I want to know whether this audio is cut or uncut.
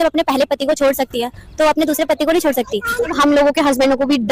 cut